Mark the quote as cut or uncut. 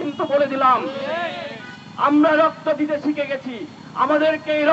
uncut